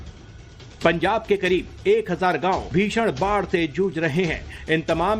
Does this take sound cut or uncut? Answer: cut